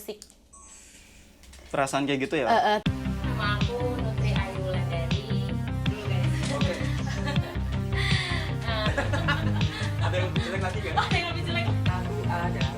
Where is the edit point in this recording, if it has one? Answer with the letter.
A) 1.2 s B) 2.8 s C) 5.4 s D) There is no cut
B